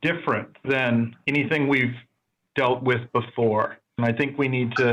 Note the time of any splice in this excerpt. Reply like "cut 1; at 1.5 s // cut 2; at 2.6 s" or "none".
cut 1; at 1.2 s // cut 2; at 3.9 s

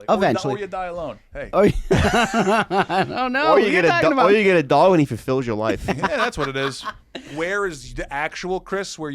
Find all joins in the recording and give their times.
cut 1; at 7.3 s

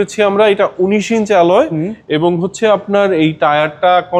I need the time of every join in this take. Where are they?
none

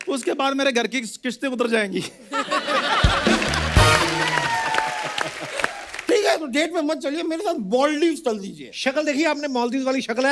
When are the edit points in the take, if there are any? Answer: cut 1; at 5.9 s

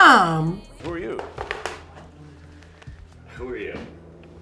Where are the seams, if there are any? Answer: none

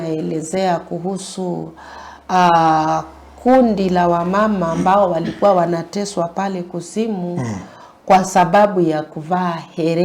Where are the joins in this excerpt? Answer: none

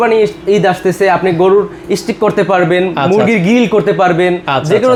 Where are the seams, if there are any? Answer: none

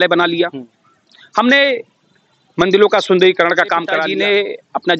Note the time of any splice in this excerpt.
cut 1; at 4.1 s

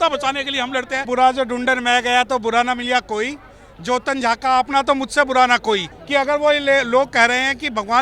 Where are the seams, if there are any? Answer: cut 1; at 1.1 s // cut 2; at 5.9 s

